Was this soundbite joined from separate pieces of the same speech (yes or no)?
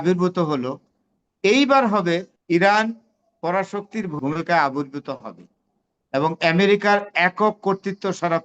yes